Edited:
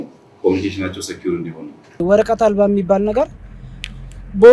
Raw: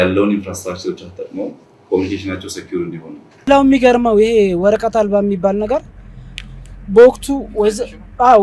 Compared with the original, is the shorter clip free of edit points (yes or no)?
no